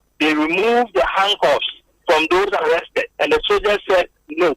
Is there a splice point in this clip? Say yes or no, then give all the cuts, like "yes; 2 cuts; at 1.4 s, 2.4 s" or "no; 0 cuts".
yes; 1 cut; at 3.0 s